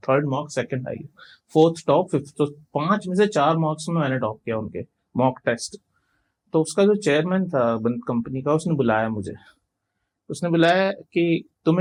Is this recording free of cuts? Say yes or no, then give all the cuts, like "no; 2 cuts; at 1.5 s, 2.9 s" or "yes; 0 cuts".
yes; 0 cuts